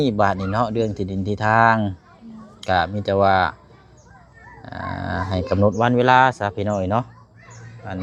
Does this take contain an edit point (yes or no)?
no